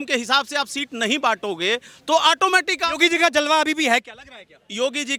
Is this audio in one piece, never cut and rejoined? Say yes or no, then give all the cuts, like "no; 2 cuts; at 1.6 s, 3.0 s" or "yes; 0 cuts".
yes; 0 cuts